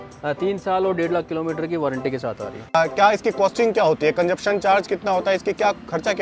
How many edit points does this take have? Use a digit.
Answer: 1